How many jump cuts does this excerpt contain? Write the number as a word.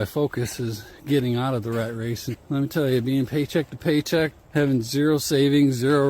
two